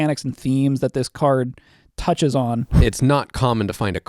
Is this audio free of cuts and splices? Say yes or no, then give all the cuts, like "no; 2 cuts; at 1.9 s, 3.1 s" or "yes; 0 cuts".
no; 1 cut; at 2.7 s